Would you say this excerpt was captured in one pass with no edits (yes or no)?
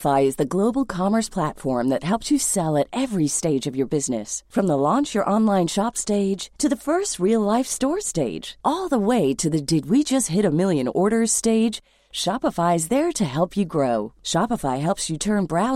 yes